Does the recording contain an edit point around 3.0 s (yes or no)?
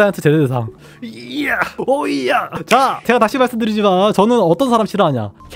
yes